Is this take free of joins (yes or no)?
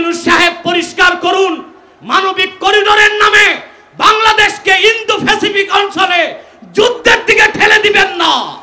yes